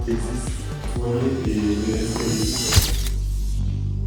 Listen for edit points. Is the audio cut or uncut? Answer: uncut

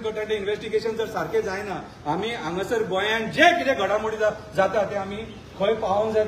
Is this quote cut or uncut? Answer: uncut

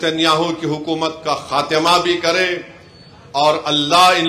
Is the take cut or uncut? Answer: uncut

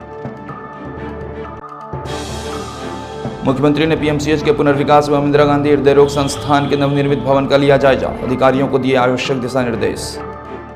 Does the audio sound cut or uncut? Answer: cut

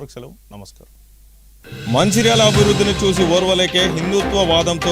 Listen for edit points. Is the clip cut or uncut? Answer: cut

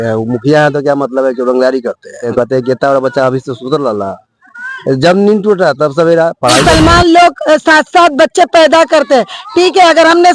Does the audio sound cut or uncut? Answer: cut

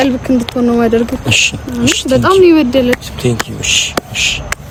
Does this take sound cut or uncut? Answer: uncut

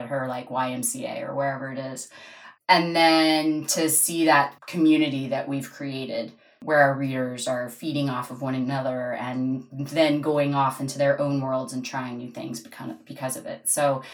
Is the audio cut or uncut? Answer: uncut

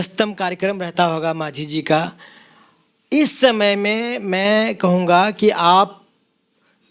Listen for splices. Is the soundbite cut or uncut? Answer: uncut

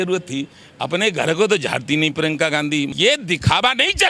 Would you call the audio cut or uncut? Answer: cut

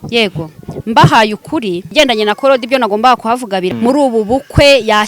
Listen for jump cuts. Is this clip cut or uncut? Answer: cut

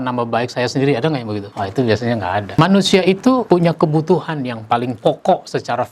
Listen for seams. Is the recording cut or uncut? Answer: cut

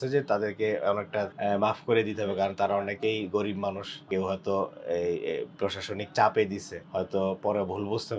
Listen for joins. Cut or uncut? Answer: cut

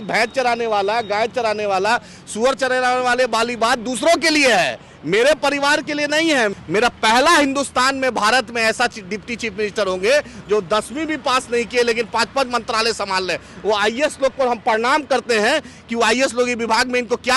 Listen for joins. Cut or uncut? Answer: cut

